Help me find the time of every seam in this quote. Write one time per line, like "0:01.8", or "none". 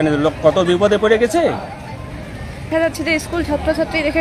0:02.7